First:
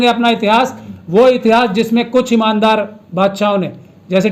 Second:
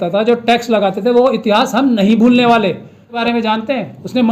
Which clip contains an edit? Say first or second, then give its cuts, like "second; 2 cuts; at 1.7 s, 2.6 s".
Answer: second; 1 cut; at 3.2 s